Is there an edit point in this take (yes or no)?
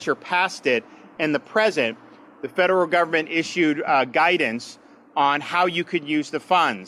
no